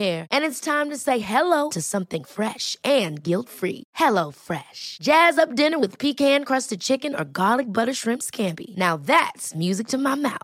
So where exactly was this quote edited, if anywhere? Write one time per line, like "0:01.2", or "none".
none